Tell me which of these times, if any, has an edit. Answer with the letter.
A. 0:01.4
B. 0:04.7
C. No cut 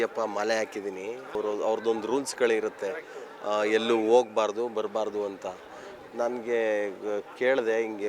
A